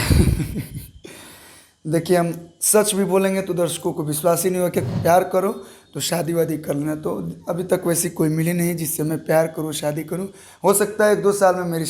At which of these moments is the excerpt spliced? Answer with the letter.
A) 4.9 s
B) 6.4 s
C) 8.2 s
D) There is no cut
A